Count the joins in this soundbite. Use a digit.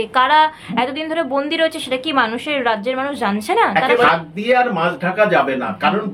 1